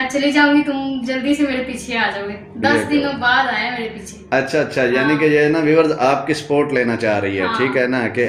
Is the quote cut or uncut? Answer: uncut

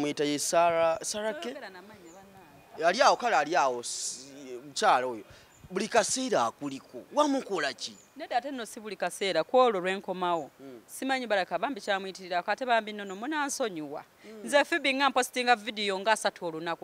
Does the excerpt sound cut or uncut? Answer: uncut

